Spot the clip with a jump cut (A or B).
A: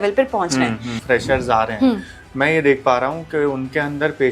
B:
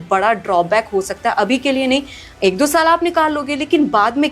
A